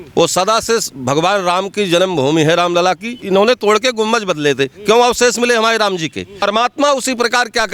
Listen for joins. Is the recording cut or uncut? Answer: cut